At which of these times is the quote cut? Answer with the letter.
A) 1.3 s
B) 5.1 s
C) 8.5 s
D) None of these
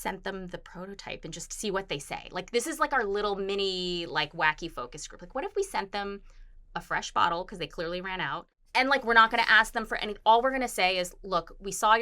C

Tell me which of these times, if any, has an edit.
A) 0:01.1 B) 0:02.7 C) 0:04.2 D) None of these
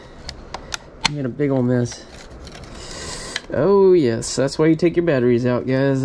D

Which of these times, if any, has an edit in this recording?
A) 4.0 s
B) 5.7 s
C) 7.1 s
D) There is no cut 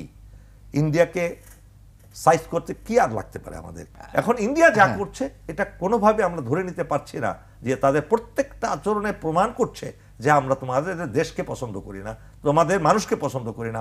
A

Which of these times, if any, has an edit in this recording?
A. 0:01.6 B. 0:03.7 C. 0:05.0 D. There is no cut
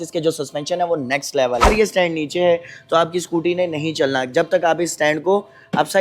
A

